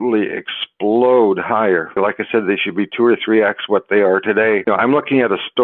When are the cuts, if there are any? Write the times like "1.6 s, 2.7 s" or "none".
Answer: 2.0 s, 4.6 s